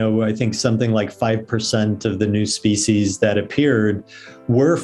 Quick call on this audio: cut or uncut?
uncut